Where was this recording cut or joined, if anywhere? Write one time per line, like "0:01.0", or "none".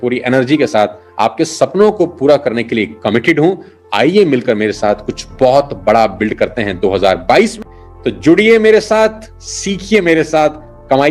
none

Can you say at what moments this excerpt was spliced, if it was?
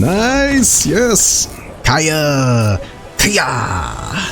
none

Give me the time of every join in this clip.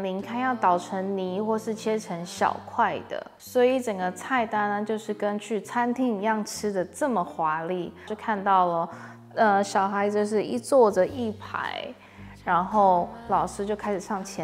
0:08.1

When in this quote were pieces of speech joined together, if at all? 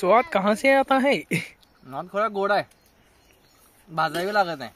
none

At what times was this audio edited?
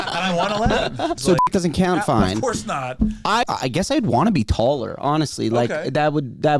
0:01.2
0:03.4

